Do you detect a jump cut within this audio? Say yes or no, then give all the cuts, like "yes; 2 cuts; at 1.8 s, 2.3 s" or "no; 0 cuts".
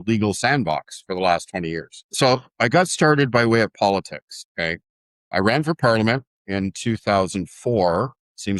no; 0 cuts